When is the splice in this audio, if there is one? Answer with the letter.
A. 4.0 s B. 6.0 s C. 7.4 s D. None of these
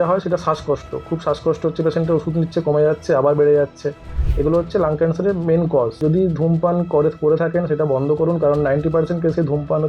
B